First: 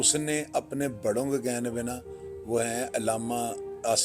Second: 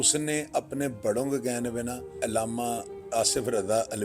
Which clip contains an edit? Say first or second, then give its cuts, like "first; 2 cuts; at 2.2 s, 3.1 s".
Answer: second; 1 cut; at 2.2 s